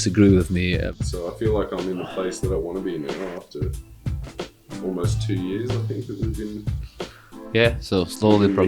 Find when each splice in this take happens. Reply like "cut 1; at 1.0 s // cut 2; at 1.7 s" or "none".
cut 1; at 0.9 s